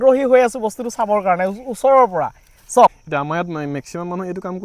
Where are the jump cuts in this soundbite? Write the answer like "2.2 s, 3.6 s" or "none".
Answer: 3.0 s